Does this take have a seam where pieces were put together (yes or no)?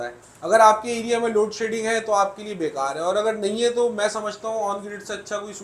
no